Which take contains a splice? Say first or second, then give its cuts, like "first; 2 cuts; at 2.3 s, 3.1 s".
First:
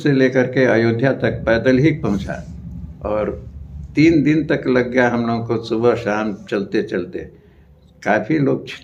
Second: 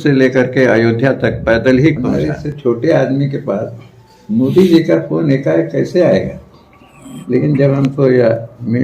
second; 1 cut; at 2.1 s